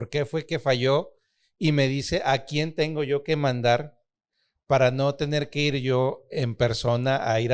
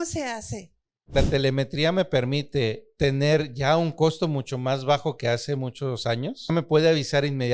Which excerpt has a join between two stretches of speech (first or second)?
second